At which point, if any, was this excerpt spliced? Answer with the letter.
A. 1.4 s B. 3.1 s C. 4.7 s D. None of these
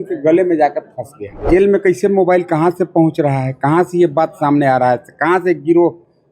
A